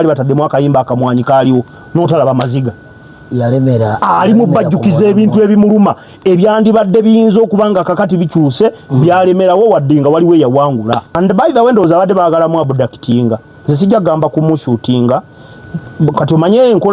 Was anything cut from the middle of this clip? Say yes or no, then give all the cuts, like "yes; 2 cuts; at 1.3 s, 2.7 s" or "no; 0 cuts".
yes; 1 cut; at 11.1 s